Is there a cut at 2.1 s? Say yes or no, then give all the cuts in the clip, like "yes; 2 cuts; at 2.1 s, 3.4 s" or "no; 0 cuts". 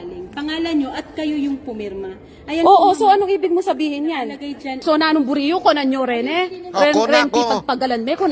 no; 1 cut; at 7.2 s